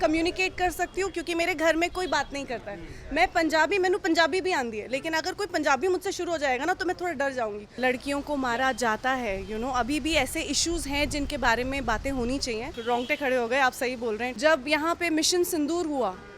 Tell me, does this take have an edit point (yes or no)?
yes